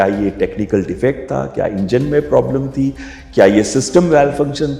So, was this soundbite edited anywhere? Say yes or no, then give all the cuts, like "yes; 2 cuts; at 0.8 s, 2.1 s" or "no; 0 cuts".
no; 0 cuts